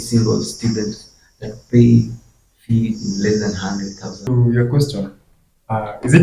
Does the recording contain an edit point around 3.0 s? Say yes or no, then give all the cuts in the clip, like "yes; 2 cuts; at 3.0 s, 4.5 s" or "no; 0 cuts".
no; 1 cut; at 4.3 s